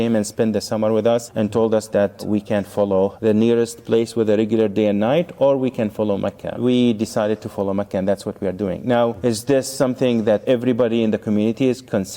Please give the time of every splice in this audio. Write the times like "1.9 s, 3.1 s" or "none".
3.1 s, 9.2 s, 10.4 s